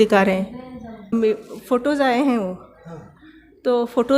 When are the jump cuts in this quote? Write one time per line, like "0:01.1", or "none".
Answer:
0:01.1